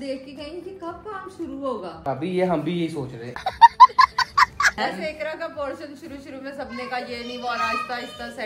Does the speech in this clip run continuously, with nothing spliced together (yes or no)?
yes